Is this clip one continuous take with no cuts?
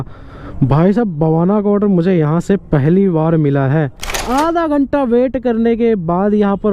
no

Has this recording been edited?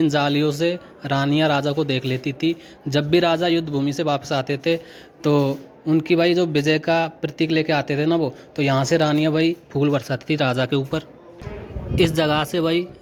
no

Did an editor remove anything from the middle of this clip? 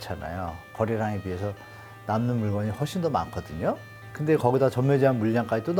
no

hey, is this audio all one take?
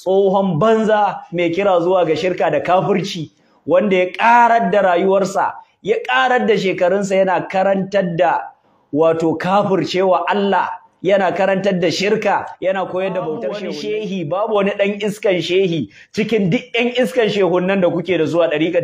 no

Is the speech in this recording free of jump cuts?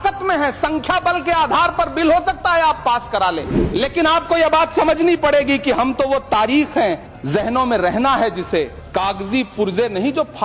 no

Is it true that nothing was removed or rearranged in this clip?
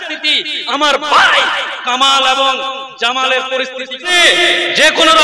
no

